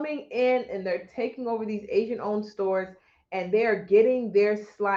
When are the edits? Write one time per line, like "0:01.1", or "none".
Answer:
none